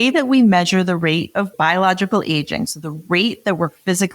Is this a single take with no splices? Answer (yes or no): no